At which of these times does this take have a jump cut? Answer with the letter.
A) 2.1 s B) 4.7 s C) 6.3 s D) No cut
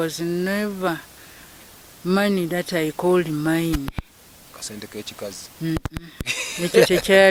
D